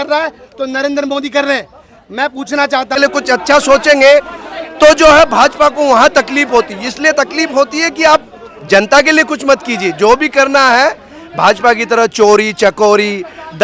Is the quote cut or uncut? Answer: cut